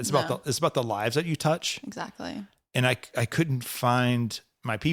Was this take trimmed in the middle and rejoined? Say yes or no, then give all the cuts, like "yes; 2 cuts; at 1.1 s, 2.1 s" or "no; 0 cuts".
no; 0 cuts